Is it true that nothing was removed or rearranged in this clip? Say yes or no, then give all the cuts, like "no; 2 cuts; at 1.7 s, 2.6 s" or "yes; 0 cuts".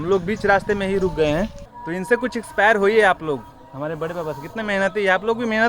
no; 1 cut; at 1.6 s